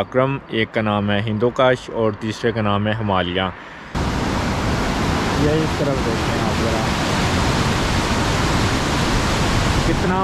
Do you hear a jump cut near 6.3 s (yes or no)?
no